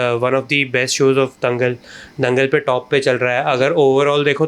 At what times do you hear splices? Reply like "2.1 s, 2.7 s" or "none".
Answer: none

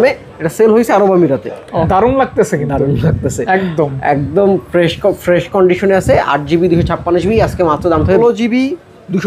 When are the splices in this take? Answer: 1.9 s, 8.2 s

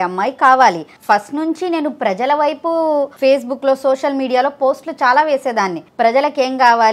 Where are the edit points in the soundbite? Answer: 0.9 s, 3.1 s, 5.8 s

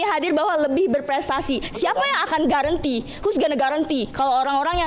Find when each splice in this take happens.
none

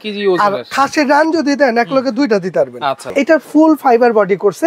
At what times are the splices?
3.0 s

